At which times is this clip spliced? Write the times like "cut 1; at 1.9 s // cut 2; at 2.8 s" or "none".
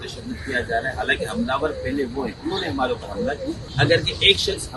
cut 1; at 3.6 s